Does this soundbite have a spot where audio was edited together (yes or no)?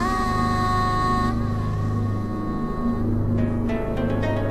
yes